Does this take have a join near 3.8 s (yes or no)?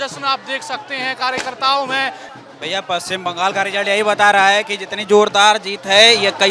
no